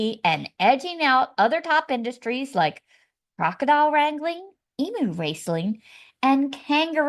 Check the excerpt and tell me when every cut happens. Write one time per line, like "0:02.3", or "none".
none